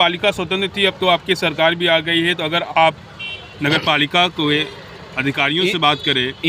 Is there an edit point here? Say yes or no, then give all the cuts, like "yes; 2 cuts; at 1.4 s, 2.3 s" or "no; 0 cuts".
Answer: no; 0 cuts